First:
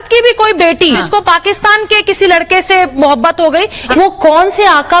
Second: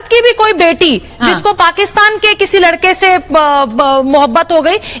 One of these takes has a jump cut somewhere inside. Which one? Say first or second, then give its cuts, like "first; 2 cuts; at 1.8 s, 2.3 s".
first; 3 cuts; at 1.0 s, 2.9 s, 3.8 s